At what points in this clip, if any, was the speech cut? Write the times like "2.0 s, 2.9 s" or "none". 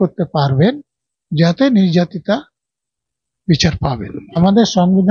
4.2 s